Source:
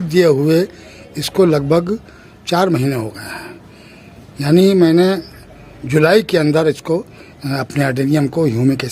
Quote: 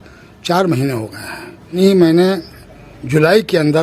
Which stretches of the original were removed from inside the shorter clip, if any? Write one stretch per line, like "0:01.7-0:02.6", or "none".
0:03.8-0:04.6